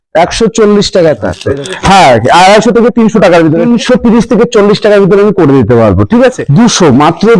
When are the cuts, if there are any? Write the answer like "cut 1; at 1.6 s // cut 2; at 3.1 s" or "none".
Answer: cut 1; at 1.3 s // cut 2; at 3.6 s // cut 3; at 6.4 s